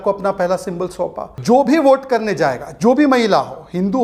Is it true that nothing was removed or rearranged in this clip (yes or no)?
no